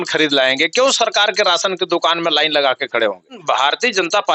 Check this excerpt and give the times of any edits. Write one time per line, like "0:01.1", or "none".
0:03.4